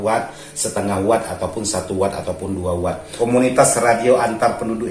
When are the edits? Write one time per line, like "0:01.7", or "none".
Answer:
0:03.1